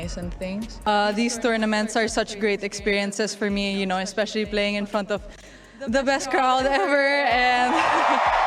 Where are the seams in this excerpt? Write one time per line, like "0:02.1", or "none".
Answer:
0:01.1